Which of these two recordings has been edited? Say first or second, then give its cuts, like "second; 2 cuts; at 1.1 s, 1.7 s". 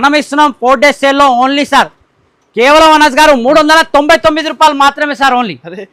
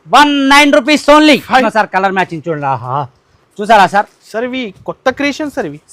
second; 1 cut; at 1.6 s